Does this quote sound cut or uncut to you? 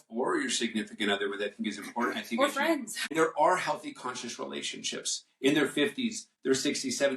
cut